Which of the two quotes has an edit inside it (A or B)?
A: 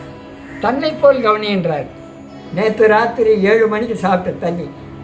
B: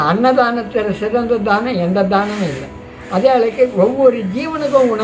A